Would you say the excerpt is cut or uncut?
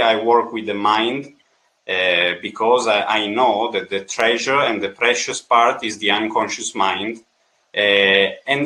uncut